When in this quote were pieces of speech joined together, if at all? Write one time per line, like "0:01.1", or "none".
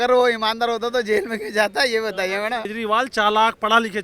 0:02.7